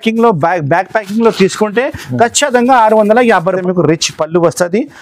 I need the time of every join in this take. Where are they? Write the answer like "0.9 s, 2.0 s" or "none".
3.6 s